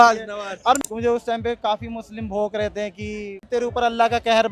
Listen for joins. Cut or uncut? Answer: cut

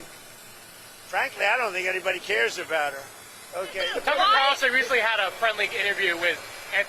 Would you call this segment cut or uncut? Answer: cut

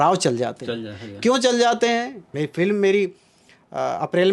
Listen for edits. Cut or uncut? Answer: cut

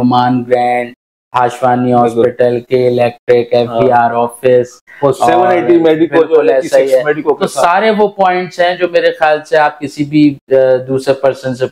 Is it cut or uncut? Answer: uncut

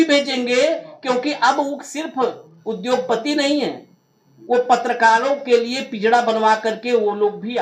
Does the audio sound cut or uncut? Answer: uncut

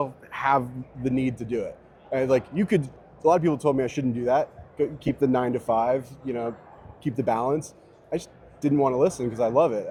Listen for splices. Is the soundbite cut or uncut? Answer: uncut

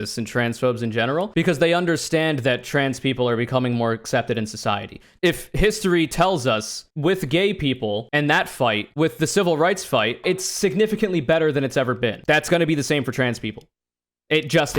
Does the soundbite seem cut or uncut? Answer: cut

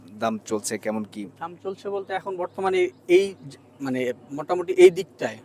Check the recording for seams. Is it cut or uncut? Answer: uncut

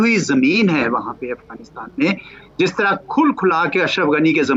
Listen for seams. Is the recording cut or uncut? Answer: uncut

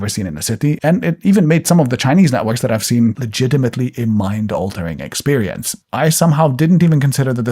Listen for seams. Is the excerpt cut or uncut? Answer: cut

